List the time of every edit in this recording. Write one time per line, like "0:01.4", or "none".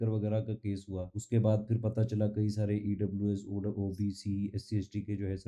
0:01.1